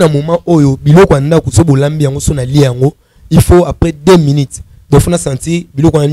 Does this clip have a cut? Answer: no; 0 cuts

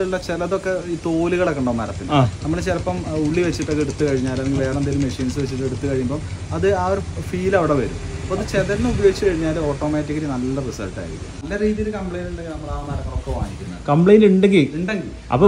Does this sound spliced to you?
yes; 1 cut; at 11.4 s

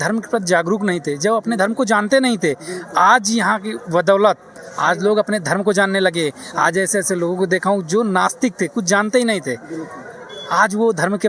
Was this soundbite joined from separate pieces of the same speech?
no; 0 cuts

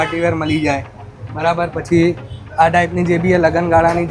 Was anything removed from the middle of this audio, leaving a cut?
no; 0 cuts

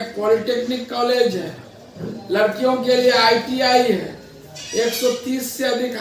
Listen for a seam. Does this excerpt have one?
no; 0 cuts

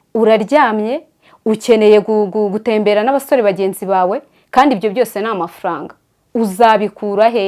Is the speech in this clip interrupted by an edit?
no; 0 cuts

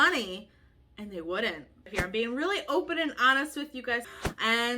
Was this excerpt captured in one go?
no; 2 cuts; at 1.9 s, 4.0 s

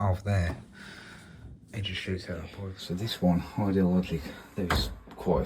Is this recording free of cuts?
no; 1 cut; at 2.7 s

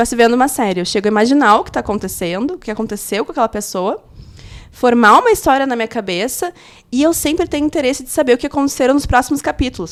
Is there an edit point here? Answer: no; 0 cuts

